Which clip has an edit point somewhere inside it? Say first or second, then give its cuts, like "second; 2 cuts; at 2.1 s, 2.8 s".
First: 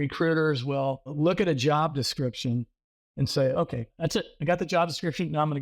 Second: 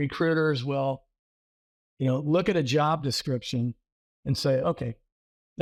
first; 2 cuts; at 1.1 s, 3.9 s